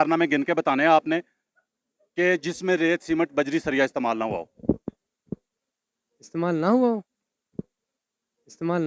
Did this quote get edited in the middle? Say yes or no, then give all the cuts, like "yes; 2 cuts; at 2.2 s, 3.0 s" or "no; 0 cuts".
no; 0 cuts